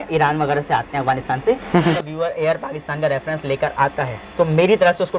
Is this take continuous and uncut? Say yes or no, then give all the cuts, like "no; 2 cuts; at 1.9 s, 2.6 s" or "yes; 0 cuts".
no; 1 cut; at 1.9 s